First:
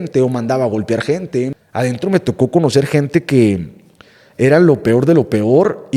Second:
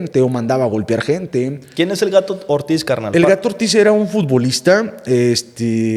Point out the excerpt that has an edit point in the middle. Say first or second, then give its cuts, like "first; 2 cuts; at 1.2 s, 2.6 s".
first; 1 cut; at 1.6 s